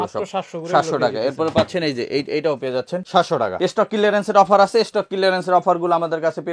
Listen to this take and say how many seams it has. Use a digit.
1